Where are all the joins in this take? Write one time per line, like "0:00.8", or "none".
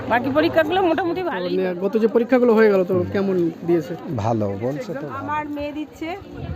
0:01.3
0:05.0